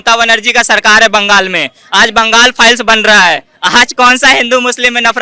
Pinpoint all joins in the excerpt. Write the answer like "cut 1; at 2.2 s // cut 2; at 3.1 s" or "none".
none